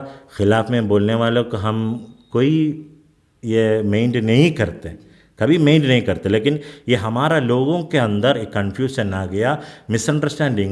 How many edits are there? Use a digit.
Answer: 0